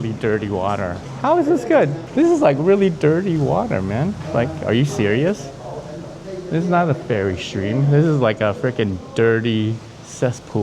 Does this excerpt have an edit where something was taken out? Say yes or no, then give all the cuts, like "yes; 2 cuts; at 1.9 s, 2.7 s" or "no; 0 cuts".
yes; 2 cuts; at 1.0 s, 2.0 s